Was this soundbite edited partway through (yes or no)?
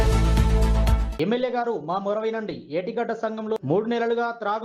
yes